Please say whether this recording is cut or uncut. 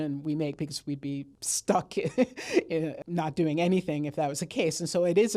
cut